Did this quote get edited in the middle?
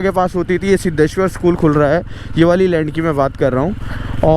no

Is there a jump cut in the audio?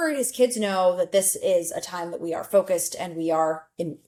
no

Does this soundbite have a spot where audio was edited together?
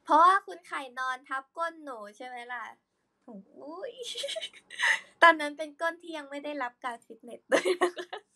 no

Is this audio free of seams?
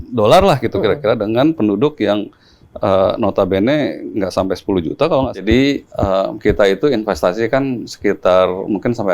no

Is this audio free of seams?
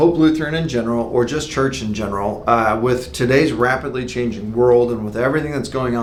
yes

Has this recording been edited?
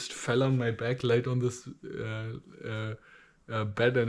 no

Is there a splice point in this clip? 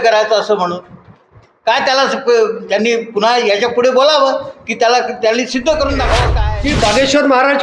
yes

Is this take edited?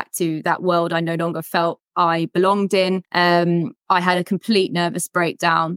yes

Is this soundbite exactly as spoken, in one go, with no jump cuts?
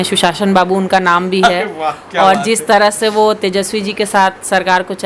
yes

